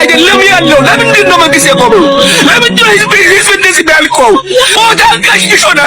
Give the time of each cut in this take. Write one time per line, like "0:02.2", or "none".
0:04.8